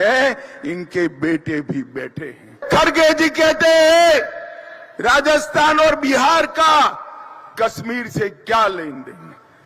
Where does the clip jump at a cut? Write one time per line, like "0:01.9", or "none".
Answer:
0:02.6